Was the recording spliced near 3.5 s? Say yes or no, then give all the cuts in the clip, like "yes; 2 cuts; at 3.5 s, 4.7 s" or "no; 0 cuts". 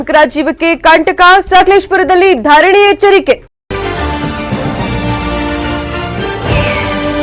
yes; 1 cut; at 3.5 s